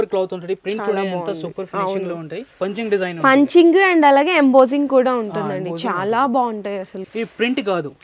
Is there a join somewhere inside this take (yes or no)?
yes